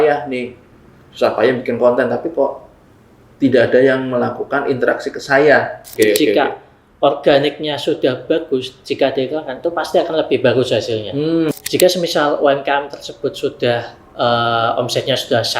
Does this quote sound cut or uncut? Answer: cut